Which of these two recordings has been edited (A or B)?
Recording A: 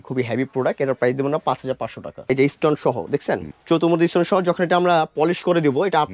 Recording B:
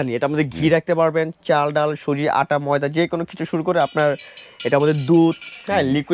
A